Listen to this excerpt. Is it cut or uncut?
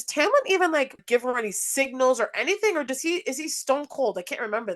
cut